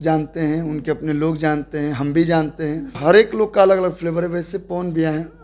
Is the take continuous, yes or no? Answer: no